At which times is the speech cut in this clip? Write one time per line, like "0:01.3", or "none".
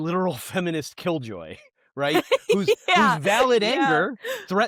none